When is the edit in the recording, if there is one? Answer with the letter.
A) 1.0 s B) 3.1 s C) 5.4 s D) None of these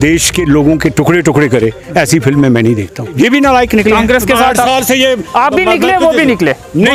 B